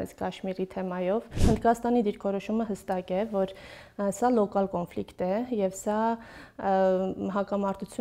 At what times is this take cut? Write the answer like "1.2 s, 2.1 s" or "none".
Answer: 1.4 s